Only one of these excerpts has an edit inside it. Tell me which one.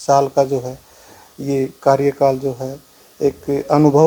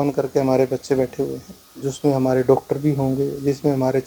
second; 1 cut; at 1.8 s

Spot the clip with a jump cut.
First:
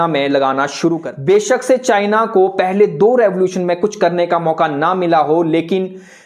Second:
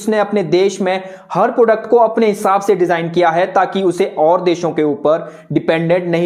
first; 1 cut; at 1.1 s

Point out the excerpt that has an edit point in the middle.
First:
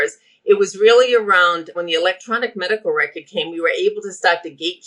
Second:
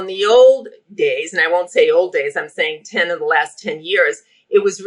first; 1 cut; at 1.8 s

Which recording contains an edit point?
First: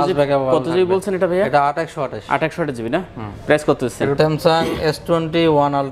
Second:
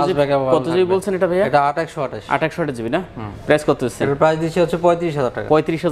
first; 1 cut; at 4.1 s

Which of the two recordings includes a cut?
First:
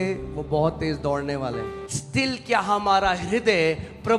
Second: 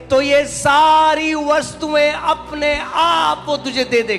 first; 1 cut; at 1.8 s

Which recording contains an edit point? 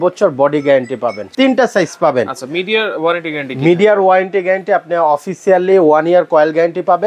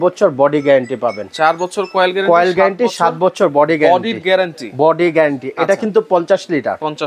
first; 1 cut; at 1.2 s

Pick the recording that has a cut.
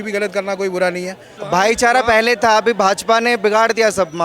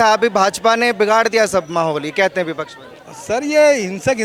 first; 1 cut; at 1.3 s

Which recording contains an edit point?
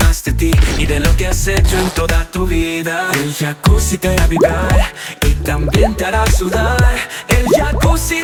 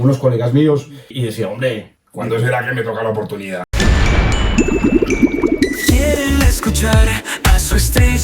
second; 3 cuts; at 1.1 s, 2.0 s, 3.7 s

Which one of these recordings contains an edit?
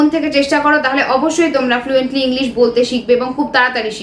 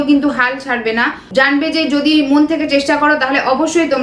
second; 1 cut; at 1.2 s

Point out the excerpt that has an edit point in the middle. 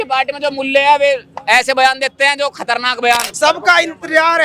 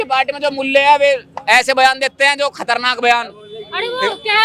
first; 1 cut; at 3.3 s

